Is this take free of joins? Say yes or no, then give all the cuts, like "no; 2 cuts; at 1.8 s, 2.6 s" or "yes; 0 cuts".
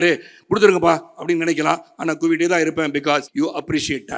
no; 1 cut; at 3.3 s